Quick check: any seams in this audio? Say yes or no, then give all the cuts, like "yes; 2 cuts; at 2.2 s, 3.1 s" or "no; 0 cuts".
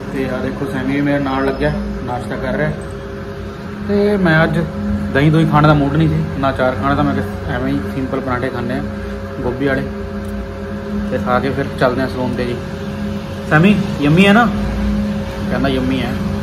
no; 0 cuts